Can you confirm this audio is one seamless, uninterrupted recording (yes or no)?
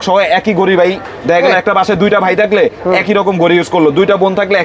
yes